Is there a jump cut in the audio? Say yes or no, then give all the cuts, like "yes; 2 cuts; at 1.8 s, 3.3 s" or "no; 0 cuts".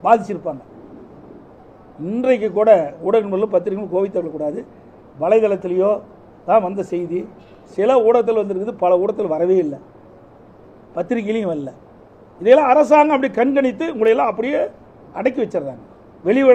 no; 0 cuts